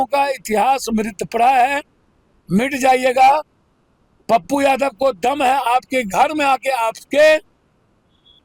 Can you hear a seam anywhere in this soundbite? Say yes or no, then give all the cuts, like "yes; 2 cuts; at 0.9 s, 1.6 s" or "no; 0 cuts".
no; 0 cuts